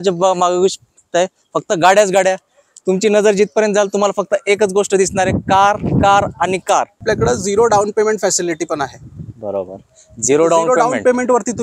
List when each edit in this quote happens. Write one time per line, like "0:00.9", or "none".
0:07.0